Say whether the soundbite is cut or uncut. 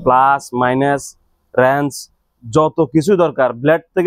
uncut